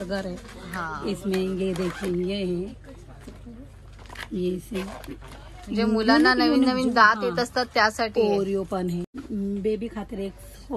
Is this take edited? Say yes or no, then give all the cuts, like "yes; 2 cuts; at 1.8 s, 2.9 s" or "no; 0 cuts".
yes; 1 cut; at 9.2 s